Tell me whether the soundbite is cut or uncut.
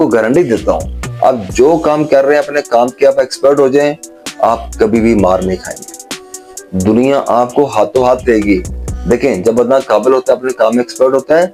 uncut